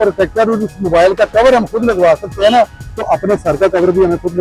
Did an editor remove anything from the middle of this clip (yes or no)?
no